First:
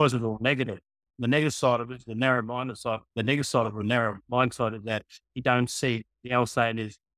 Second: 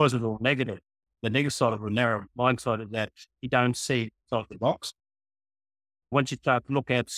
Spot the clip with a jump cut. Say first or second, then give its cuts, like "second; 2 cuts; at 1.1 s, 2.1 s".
second; 3 cuts; at 1.1 s, 4.2 s, 6.1 s